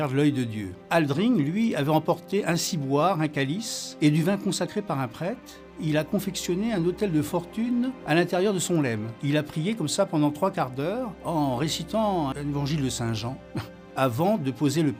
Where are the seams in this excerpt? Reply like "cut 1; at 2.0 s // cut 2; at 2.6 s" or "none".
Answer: none